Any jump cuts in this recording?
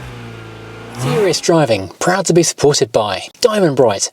yes; 1 cut; at 1.1 s

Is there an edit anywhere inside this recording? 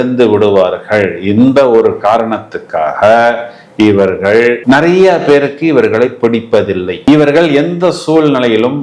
no; 0 cuts

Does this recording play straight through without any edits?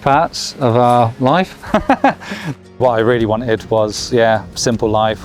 no; 1 cut; at 2.4 s

